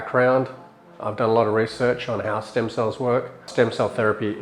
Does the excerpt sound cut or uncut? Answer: cut